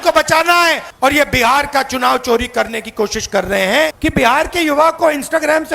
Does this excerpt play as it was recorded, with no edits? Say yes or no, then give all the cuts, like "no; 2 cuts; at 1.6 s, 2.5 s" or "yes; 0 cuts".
no; 2 cuts; at 0.9 s, 4.0 s